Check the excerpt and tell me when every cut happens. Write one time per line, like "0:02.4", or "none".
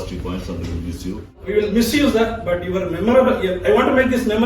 0:01.4